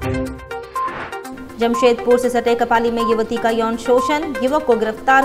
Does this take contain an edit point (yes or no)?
no